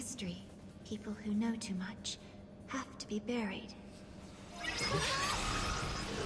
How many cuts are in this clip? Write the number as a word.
zero